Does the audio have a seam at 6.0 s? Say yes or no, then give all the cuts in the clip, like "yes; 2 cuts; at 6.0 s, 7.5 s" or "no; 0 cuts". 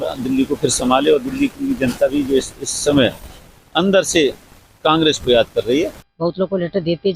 yes; 1 cut; at 6.0 s